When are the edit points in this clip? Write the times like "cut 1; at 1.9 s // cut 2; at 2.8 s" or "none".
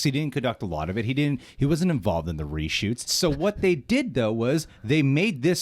none